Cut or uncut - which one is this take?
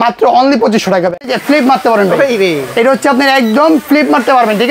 cut